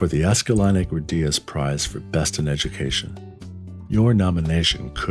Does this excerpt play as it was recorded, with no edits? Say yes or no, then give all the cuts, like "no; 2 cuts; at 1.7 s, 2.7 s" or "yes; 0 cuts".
yes; 0 cuts